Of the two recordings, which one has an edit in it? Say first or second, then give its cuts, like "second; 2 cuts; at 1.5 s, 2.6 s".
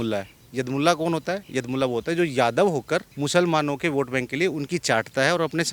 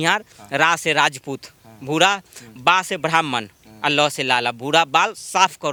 first; 1 cut; at 3.1 s